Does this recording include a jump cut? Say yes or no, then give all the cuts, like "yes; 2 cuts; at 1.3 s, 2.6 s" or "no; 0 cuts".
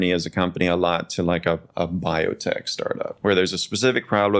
yes; 1 cut; at 3.1 s